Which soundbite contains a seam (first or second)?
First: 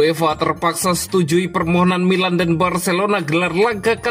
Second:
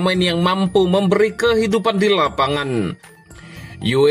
second